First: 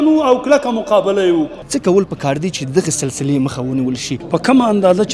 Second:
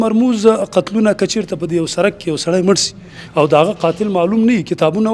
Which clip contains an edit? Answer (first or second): first